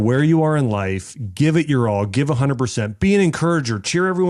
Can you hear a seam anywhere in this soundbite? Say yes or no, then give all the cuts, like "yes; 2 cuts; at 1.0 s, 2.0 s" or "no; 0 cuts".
no; 0 cuts